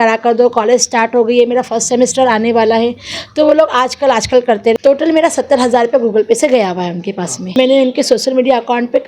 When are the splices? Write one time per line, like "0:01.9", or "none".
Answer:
0:04.7
0:07.5